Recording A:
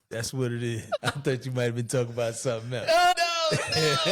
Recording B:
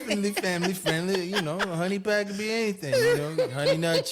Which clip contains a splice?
A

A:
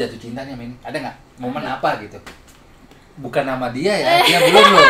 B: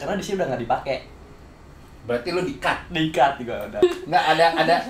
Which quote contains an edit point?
B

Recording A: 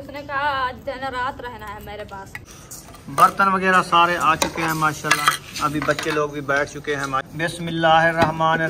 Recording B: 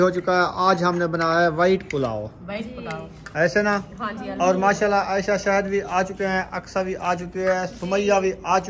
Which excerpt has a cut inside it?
A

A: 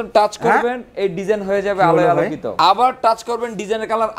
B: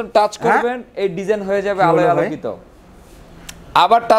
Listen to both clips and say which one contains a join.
A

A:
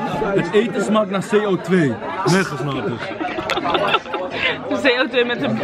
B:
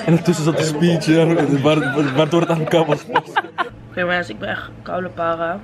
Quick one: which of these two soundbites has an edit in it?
B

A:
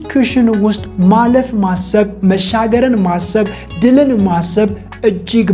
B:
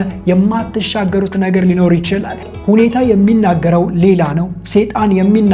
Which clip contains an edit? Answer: B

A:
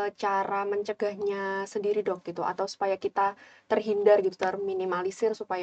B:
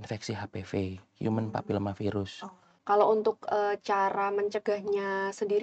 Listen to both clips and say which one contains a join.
B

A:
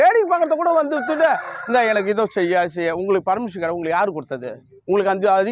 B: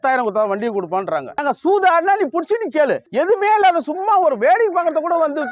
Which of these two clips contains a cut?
B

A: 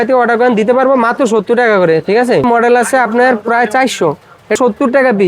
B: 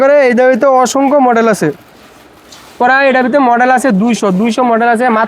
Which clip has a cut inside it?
A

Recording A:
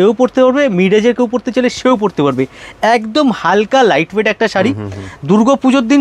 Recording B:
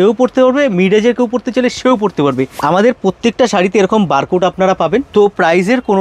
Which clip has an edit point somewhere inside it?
B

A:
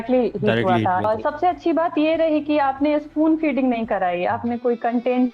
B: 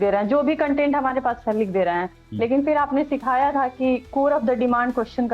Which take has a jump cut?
A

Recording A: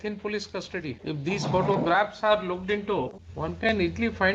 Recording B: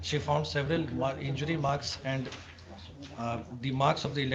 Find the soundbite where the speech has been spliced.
A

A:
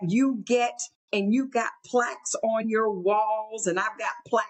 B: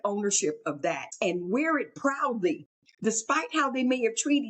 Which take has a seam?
B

